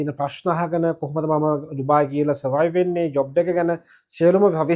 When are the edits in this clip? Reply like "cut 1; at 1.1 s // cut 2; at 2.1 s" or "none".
none